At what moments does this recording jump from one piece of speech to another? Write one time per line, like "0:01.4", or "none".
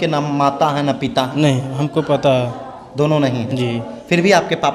none